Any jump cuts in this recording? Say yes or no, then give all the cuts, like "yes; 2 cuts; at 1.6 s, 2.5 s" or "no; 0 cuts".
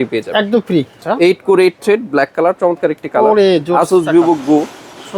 yes; 1 cut; at 1.0 s